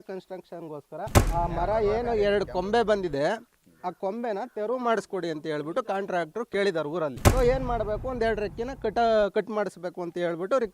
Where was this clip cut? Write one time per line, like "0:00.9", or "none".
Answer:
0:01.2
0:07.2